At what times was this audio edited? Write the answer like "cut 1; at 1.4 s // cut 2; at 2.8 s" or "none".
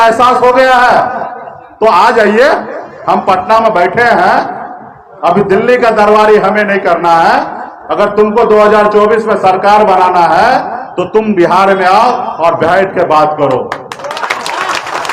none